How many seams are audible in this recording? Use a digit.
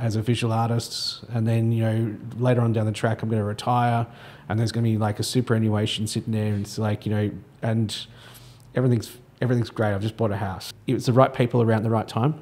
1